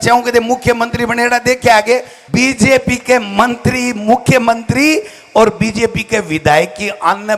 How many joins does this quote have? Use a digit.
1